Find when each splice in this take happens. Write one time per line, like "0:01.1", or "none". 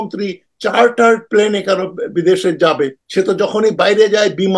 0:03.0

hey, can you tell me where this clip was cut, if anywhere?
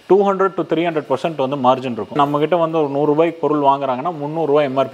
0:02.2

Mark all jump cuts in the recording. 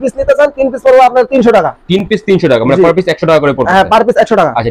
none

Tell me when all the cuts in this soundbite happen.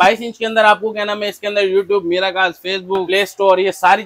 0:03.1

